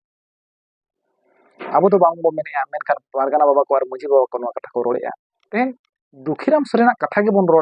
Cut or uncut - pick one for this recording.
cut